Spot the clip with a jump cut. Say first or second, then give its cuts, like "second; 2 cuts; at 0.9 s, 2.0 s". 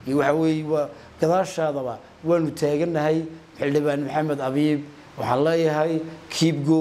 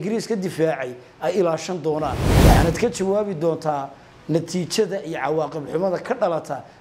second; 1 cut; at 2.3 s